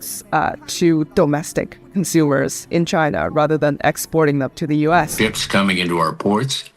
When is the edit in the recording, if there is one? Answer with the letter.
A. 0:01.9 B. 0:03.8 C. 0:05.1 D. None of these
C